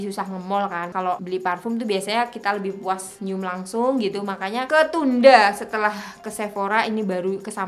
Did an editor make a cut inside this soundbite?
yes; 3 cuts; at 1.0 s, 3.1 s, 4.7 s

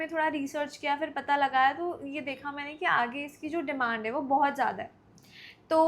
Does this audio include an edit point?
no; 0 cuts

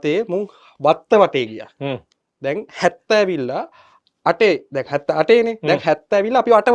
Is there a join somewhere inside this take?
no; 0 cuts

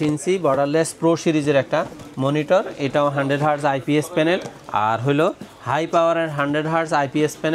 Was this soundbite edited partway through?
no; 0 cuts

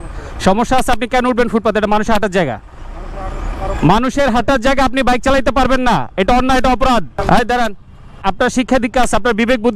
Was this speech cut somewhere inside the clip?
yes; 2 cuts; at 7.2 s, 8.2 s

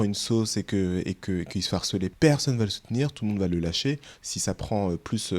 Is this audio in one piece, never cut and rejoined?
no; 1 cut; at 2.1 s

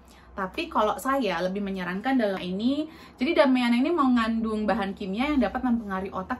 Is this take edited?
yes; 1 cut; at 2.4 s

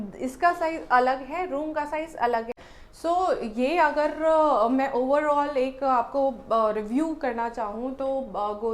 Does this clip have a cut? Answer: yes; 1 cut; at 2.5 s

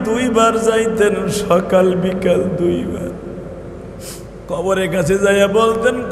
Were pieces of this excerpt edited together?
yes; 1 cut; at 4.3 s

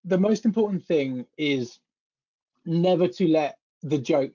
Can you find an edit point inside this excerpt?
no; 0 cuts

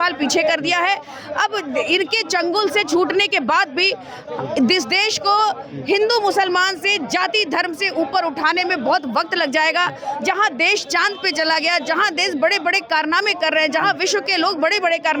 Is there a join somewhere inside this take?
no; 0 cuts

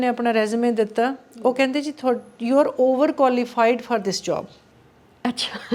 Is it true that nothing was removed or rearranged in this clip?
yes; 0 cuts

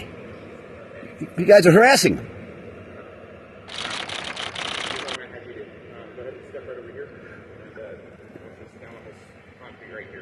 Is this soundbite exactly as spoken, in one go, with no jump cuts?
yes; 0 cuts

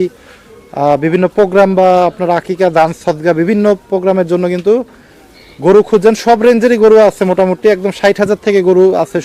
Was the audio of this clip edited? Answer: no; 0 cuts

